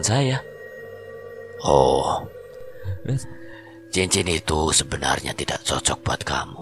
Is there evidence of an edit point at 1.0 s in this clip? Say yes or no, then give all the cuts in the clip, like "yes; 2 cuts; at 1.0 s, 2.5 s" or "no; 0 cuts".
no; 1 cut; at 2.9 s